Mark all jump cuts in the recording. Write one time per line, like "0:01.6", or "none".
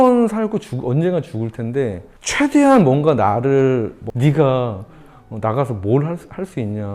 0:04.0

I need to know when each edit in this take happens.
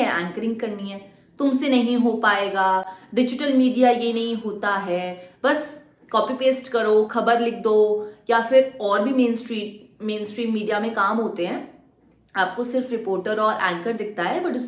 none

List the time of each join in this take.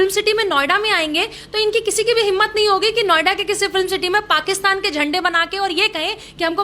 none

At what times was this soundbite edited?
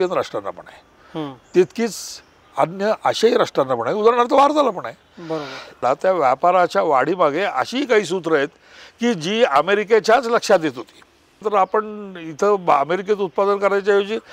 0:05.8
0:11.4

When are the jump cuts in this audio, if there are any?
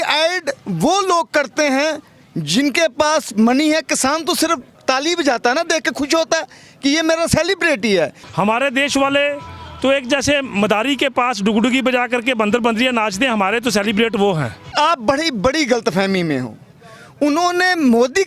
0:08.2
0:14.6

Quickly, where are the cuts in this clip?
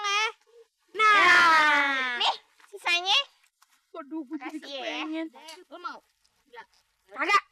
0:05.5

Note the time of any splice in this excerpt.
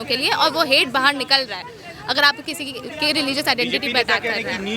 none

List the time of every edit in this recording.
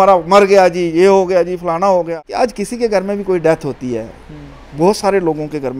0:02.2

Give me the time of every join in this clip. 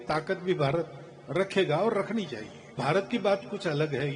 0:02.8

